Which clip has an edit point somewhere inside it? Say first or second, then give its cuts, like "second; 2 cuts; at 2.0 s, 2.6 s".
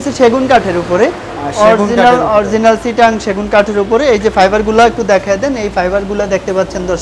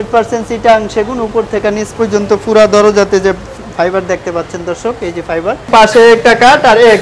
second; 1 cut; at 5.7 s